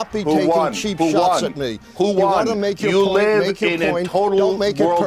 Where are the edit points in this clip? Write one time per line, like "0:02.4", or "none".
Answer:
0:02.1